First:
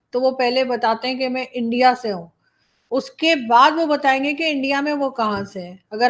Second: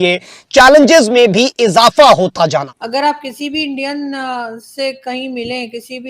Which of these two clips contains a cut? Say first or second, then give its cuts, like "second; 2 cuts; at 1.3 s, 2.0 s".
second; 1 cut; at 2.7 s